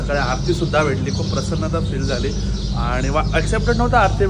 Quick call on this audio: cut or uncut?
uncut